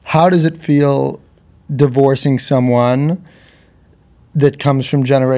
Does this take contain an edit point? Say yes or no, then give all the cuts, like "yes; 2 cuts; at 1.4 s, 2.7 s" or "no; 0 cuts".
no; 0 cuts